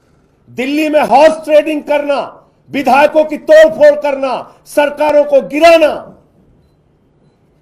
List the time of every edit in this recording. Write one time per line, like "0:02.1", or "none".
none